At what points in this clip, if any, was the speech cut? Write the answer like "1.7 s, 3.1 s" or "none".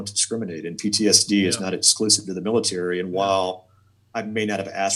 none